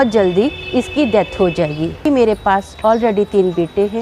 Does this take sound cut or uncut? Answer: cut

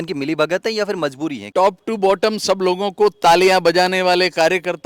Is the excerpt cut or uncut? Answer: cut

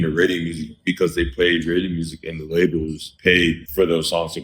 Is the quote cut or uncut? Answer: cut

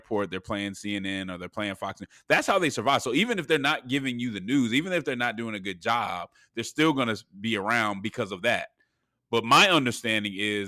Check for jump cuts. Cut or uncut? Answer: uncut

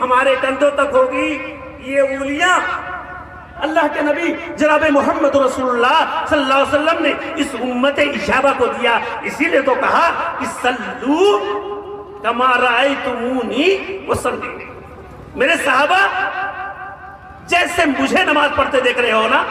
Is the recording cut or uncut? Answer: cut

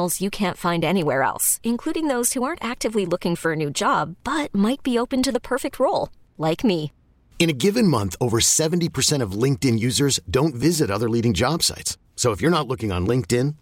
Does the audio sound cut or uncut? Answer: uncut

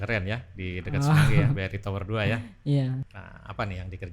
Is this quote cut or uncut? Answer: cut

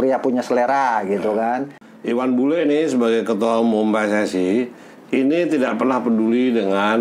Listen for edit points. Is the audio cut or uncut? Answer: cut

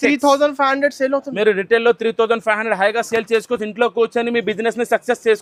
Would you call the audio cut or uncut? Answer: uncut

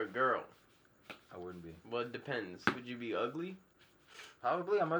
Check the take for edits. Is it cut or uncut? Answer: uncut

